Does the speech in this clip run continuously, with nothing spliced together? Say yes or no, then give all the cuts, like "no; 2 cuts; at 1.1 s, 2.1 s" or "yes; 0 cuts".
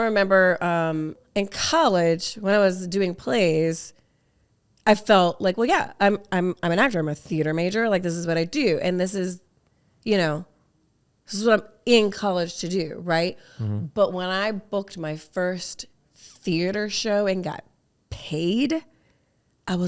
no; 1 cut; at 1.2 s